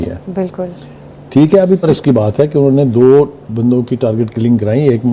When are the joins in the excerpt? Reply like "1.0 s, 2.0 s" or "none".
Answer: 1.8 s